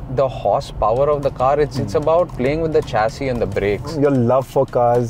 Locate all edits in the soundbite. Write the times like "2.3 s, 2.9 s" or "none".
2.3 s, 3.9 s

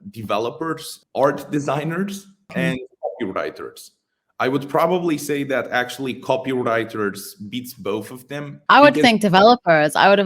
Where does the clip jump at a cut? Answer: 0.9 s, 2.5 s, 8.5 s

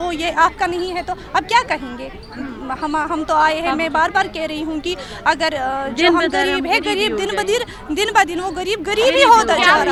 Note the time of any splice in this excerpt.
none

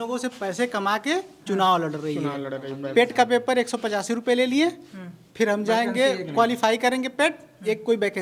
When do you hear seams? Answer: none

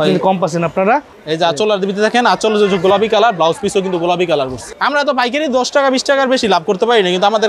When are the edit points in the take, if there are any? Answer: 1.1 s, 4.7 s

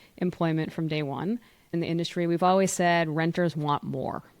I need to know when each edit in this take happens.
1.7 s

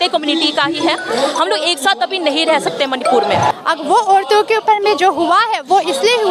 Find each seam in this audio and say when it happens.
3.5 s

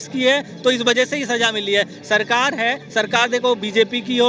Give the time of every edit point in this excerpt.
none

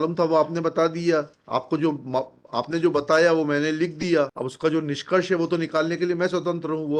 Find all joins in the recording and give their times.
4.4 s

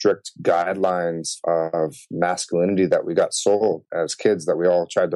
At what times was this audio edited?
1.3 s

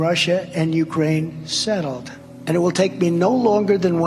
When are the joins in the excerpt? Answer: none

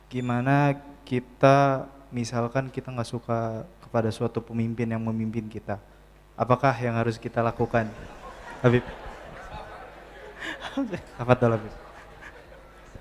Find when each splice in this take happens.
none

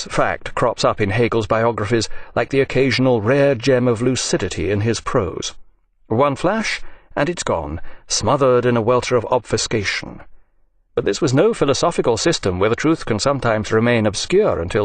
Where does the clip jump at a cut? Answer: 1.3 s

